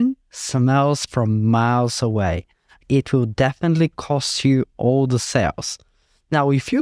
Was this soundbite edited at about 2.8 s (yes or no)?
yes